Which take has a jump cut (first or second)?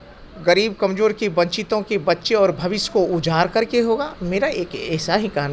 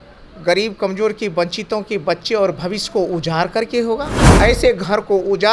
second